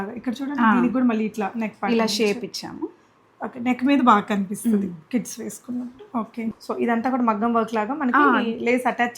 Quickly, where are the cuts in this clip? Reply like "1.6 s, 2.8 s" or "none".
6.6 s